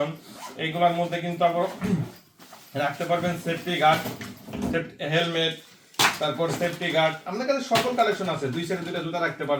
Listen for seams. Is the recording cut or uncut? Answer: uncut